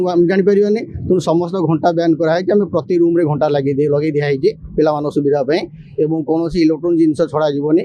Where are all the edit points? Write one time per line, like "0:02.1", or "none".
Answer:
none